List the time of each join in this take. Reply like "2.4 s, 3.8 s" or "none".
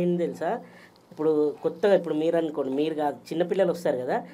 none